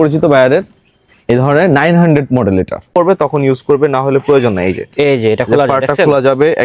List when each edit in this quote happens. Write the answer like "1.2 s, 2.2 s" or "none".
2.9 s